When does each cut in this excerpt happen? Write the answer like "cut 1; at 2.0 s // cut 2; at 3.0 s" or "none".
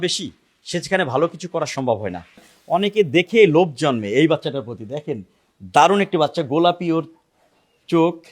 cut 1; at 2.5 s